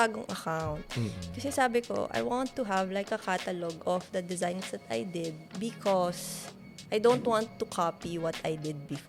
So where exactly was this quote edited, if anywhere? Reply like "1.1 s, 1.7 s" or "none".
none